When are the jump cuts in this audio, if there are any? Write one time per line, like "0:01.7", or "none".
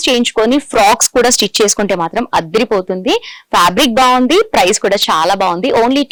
none